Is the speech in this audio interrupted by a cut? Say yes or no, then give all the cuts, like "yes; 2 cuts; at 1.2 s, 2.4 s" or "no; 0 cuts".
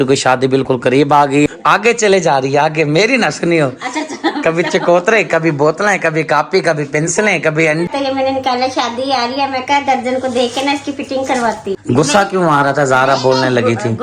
yes; 3 cuts; at 1.5 s, 7.9 s, 11.7 s